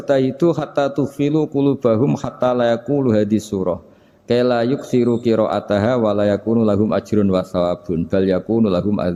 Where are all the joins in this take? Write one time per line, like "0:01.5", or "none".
none